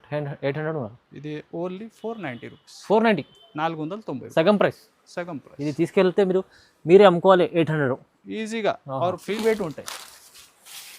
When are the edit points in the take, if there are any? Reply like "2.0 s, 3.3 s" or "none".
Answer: 9.4 s